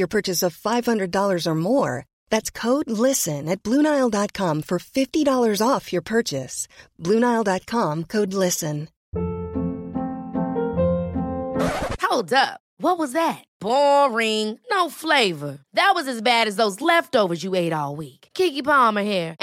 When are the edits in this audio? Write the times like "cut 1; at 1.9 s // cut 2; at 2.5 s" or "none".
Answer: cut 1; at 8.9 s